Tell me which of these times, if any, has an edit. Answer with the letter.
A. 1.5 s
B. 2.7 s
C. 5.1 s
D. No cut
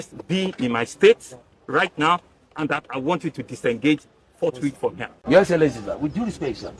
C